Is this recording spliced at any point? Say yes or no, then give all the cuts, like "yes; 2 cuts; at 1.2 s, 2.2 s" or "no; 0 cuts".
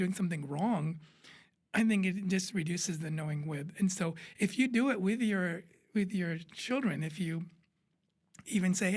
no; 0 cuts